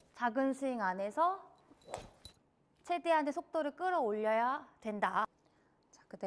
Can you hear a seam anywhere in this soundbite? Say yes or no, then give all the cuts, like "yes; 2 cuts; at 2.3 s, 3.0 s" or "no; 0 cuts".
yes; 1 cut; at 5.4 s